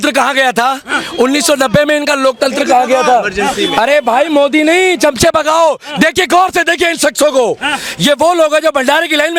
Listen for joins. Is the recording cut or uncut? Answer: uncut